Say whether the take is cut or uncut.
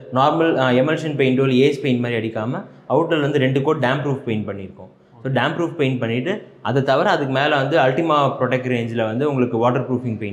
uncut